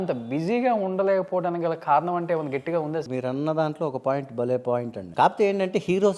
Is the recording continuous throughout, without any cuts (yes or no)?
no